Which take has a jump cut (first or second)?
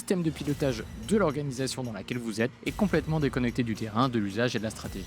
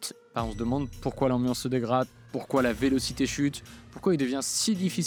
first